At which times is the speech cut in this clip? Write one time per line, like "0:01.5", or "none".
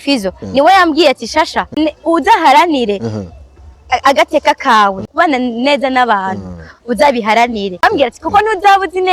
0:01.8
0:05.1
0:07.8